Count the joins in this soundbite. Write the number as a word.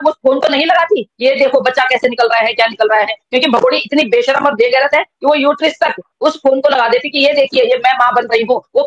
zero